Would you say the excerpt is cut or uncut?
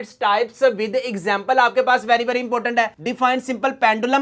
uncut